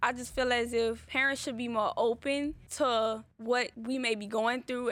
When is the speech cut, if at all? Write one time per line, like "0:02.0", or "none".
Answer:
0:01.1
0:02.6
0:03.6